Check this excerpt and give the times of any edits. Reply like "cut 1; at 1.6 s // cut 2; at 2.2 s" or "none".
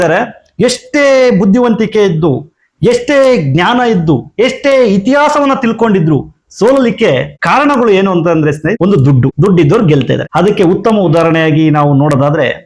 cut 1; at 7.3 s // cut 2; at 9.2 s // cut 3; at 10.3 s